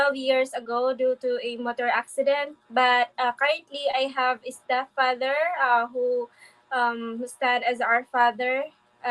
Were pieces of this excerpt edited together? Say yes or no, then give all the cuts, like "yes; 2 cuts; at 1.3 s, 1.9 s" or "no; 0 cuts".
no; 0 cuts